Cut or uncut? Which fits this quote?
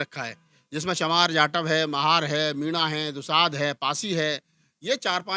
uncut